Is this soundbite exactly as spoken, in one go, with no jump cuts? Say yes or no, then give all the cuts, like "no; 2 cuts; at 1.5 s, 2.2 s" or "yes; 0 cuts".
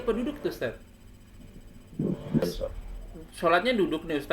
no; 1 cut; at 2.4 s